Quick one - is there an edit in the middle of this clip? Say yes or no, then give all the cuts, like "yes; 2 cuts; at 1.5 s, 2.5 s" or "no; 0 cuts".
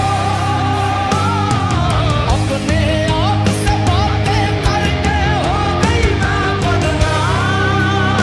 no; 0 cuts